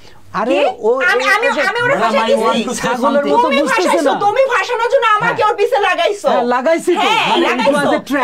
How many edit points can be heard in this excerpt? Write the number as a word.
zero